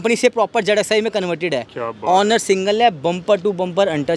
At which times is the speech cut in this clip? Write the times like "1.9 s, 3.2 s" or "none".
none